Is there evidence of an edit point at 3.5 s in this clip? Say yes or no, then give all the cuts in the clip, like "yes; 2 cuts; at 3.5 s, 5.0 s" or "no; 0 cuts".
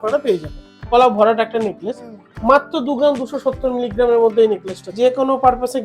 no; 2 cuts; at 0.9 s, 4.9 s